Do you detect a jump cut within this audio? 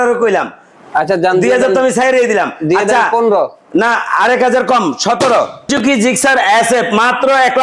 yes; 1 cut; at 5.7 s

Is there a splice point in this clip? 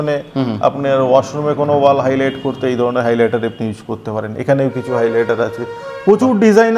no; 0 cuts

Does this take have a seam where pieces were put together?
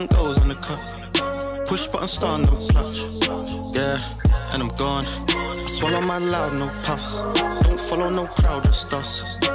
no; 0 cuts

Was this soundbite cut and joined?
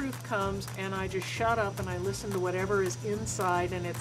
no; 0 cuts

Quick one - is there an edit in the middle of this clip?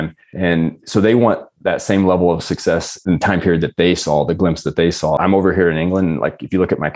yes; 2 cuts; at 3.0 s, 5.2 s

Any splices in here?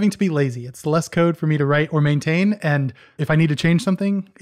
no; 0 cuts

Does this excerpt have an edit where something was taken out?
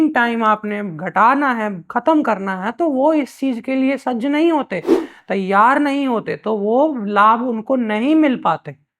no; 0 cuts

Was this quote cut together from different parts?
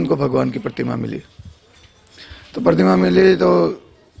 no; 0 cuts

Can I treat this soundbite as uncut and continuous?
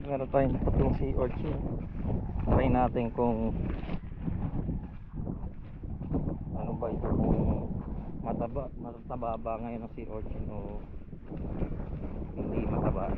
yes; 0 cuts

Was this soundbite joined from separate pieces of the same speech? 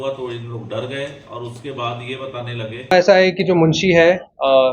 yes; 1 cut; at 2.9 s

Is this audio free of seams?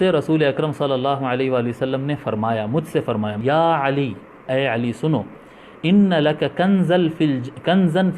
no; 1 cut; at 3.4 s

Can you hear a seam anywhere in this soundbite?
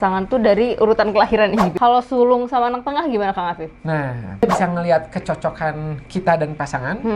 yes; 2 cuts; at 1.7 s, 4.4 s

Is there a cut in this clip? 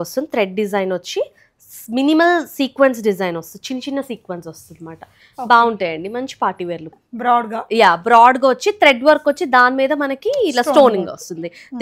yes; 1 cut; at 7.0 s

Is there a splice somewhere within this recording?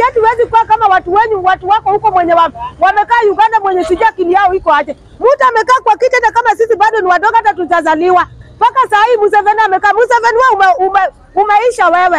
no; 0 cuts

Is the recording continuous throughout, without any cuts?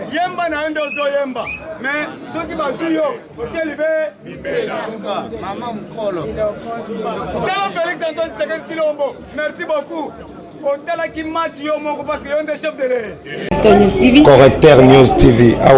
no; 1 cut; at 13.5 s

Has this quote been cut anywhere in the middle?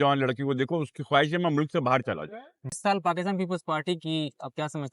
yes; 1 cut; at 2.6 s

